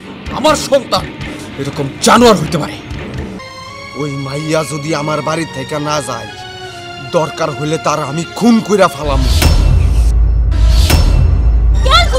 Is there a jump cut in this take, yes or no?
yes